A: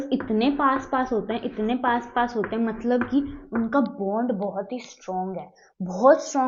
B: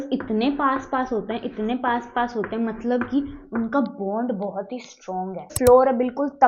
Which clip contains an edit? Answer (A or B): B